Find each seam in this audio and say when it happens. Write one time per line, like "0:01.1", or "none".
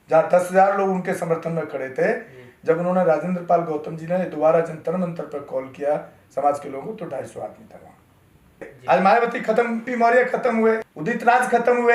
0:08.7
0:09.9
0:10.9